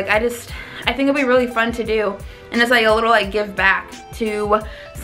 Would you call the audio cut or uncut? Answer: uncut